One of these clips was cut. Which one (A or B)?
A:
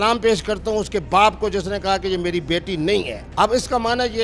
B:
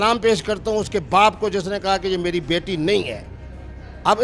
A